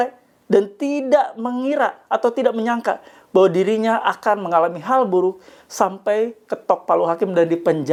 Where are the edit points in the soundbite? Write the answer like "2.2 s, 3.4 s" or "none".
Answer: none